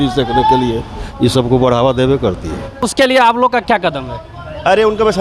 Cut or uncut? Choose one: cut